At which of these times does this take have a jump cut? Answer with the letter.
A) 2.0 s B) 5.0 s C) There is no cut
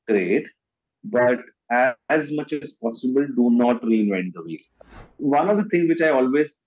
B